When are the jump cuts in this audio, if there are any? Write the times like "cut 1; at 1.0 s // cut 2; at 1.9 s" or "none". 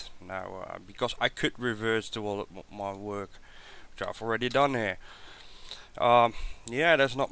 none